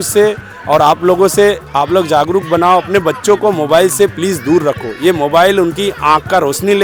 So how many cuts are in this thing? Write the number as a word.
zero